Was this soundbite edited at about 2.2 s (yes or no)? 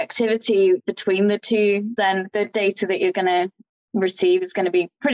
yes